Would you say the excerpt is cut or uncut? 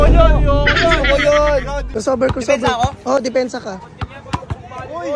cut